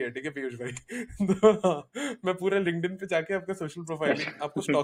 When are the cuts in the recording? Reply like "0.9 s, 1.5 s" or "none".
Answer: none